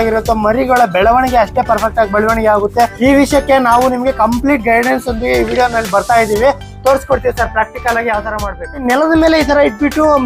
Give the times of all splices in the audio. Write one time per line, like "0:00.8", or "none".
0:02.9
0:08.8